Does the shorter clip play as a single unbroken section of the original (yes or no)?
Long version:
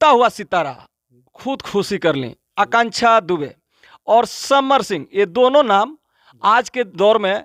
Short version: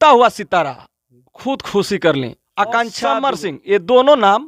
no